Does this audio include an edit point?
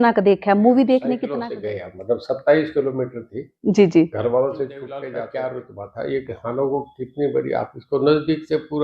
yes; 2 cuts; at 1.3 s, 5.0 s

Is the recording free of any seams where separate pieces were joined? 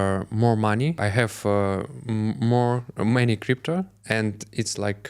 no; 1 cut; at 1.0 s

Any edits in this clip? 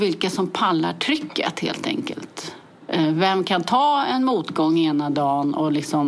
no; 0 cuts

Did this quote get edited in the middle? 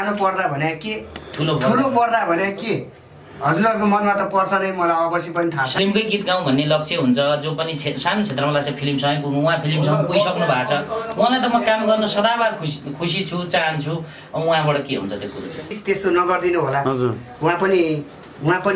yes; 2 cuts; at 5.7 s, 15.8 s

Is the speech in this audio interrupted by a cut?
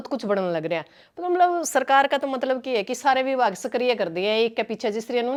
no; 0 cuts

